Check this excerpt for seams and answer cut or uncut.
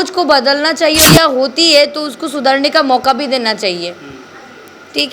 cut